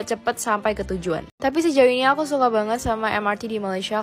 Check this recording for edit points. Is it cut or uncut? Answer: cut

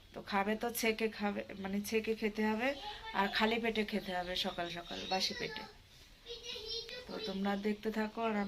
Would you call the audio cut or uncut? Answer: uncut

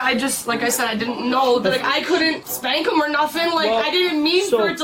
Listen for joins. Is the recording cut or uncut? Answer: uncut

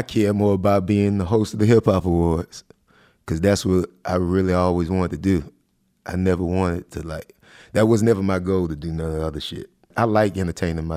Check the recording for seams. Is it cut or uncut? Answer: cut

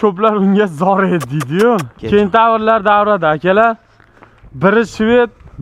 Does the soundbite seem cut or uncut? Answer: uncut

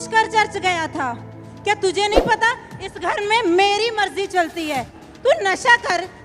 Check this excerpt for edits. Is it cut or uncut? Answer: cut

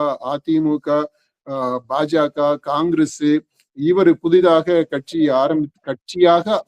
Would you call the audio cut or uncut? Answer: uncut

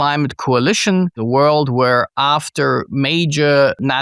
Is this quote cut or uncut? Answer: cut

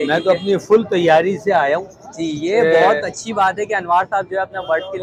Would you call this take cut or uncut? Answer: uncut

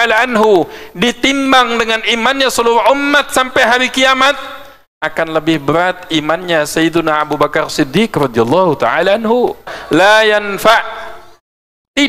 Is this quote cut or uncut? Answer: cut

